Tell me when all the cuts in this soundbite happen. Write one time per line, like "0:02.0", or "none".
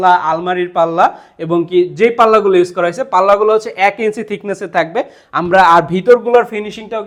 none